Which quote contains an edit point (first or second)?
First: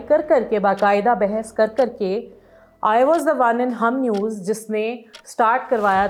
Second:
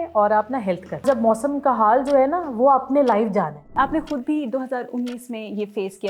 second